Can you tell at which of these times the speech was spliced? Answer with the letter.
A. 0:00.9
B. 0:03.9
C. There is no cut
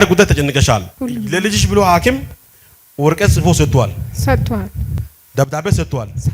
A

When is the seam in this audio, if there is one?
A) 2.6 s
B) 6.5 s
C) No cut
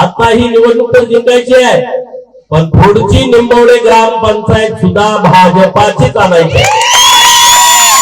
C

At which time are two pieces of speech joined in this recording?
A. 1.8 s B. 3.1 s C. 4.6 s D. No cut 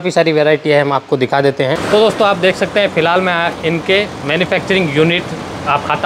A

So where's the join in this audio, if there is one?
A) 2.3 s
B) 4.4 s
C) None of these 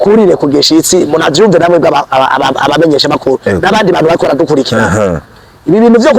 C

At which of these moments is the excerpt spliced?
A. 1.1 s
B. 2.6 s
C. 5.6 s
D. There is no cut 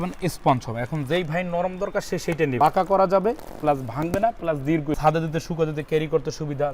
B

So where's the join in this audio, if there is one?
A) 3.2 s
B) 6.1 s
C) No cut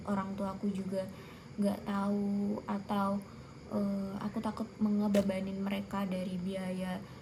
C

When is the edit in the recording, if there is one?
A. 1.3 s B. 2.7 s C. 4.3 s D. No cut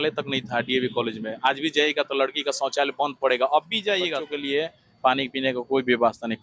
C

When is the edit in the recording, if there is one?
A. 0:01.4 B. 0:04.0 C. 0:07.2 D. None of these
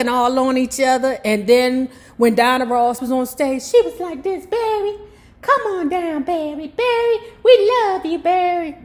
D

